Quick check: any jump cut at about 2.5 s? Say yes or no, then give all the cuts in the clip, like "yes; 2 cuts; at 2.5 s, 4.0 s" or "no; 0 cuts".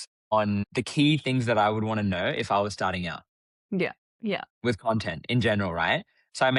no; 0 cuts